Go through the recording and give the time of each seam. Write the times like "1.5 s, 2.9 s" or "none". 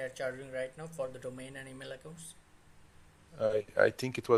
none